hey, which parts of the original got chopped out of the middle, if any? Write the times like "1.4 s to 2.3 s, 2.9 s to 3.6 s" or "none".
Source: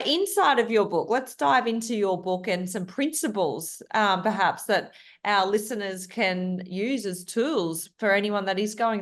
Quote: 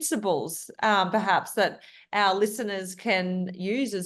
none

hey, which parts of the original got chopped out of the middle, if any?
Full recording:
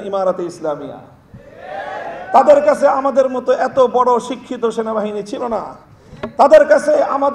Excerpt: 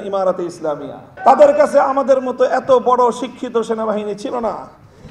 1.1 s to 2.1 s

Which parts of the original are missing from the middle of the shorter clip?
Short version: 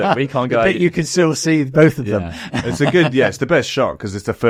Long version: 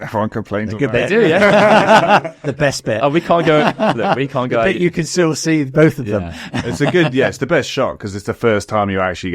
none

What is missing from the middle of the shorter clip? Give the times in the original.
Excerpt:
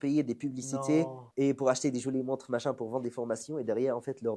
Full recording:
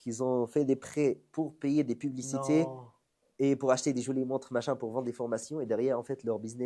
2.8 s to 3.2 s

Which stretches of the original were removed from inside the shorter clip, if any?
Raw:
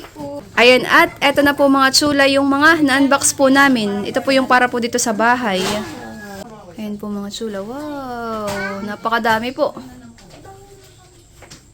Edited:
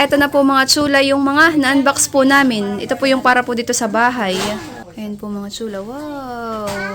6.5 s to 7.0 s

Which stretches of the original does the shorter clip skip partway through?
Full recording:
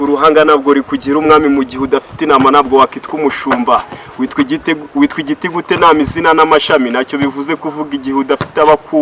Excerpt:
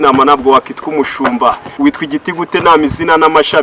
4.0 s to 4.9 s

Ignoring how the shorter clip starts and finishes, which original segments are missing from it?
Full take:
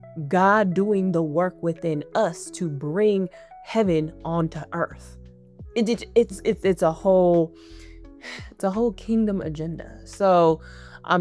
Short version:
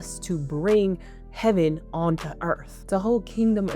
5.0 s to 8.4 s

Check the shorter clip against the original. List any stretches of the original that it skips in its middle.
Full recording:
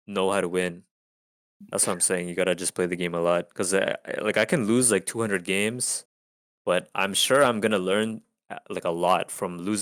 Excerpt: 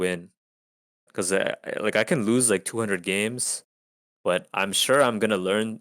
1.6 s to 3.5 s

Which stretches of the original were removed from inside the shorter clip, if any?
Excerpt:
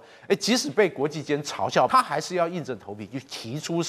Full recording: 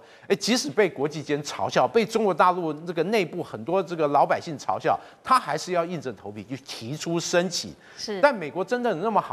1.9 s to 5.3 s

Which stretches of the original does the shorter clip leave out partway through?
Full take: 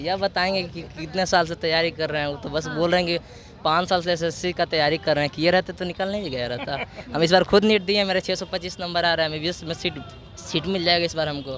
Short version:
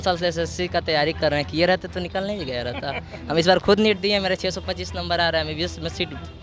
none

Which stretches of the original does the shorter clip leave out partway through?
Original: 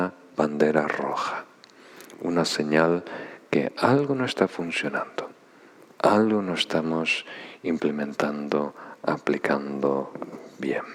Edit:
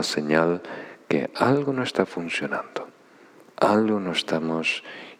none

